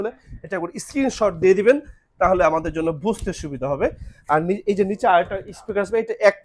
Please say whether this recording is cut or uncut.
uncut